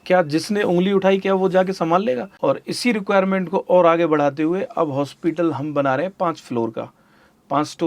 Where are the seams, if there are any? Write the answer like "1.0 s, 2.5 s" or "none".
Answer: 2.3 s